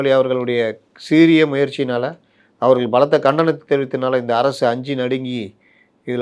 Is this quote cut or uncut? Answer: uncut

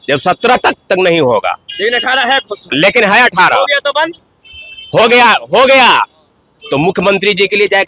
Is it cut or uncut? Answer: uncut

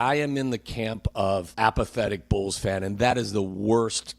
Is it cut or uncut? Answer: cut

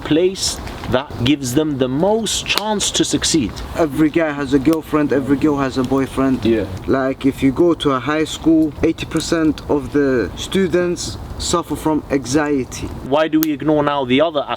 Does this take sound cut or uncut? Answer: cut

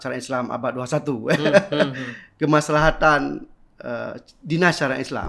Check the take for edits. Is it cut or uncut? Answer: uncut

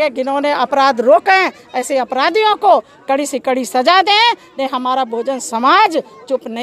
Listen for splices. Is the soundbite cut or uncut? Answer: uncut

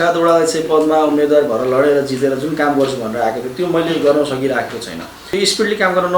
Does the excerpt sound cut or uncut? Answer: cut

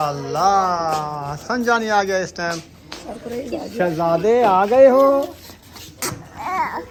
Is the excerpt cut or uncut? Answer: uncut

